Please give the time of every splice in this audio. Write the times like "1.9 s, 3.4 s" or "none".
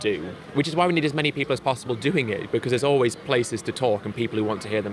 none